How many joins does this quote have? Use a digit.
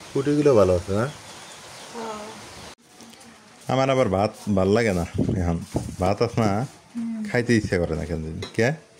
1